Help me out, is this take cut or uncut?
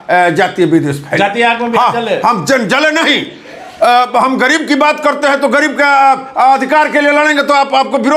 uncut